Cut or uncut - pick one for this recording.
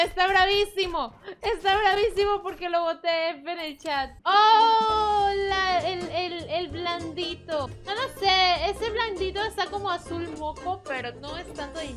cut